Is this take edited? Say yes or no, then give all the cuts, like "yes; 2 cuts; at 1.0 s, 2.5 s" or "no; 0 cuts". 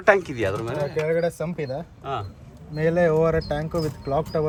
no; 0 cuts